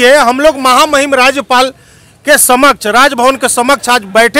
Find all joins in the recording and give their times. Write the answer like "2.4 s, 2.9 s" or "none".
none